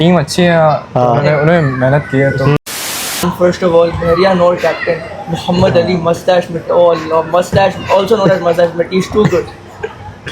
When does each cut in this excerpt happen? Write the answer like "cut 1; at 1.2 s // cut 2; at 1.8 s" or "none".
cut 1; at 3.0 s